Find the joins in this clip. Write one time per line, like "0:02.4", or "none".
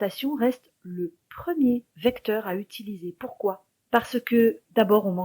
0:01.9
0:03.7